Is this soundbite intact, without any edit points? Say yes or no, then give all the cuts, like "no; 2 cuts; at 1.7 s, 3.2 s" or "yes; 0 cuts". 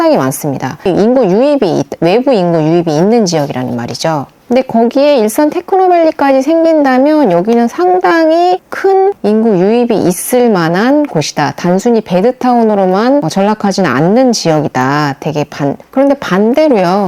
no; 2 cuts; at 0.8 s, 15.8 s